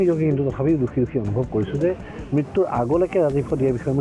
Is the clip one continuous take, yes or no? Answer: yes